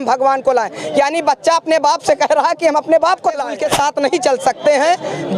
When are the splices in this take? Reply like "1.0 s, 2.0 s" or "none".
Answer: 3.5 s